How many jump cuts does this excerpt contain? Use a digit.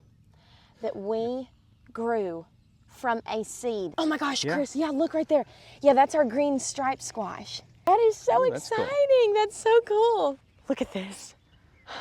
3